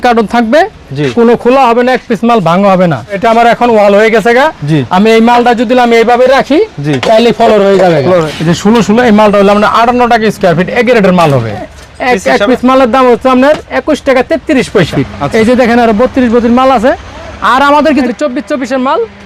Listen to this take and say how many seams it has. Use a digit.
5